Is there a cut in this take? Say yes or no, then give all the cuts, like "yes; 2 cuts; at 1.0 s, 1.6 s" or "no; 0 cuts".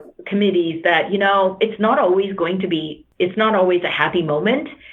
yes; 1 cut; at 3.0 s